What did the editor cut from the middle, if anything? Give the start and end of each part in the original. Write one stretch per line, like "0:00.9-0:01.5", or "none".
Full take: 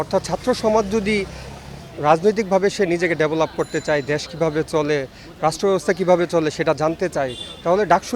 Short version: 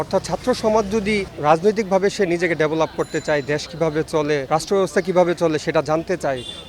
0:01.3-0:01.9
0:05.0-0:05.4